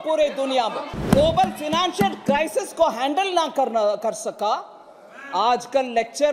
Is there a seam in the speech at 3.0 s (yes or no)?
no